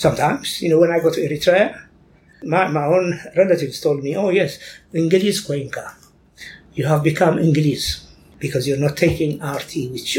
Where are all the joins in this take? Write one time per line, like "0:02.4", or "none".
0:02.4
0:08.3